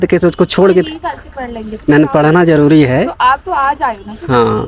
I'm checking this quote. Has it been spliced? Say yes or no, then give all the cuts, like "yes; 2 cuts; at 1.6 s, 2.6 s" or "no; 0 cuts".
no; 0 cuts